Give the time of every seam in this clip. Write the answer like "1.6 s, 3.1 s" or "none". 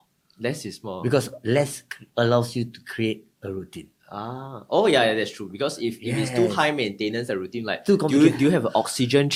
none